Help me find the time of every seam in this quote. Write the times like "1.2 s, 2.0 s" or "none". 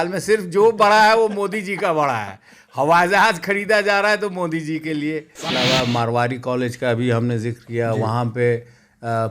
5.4 s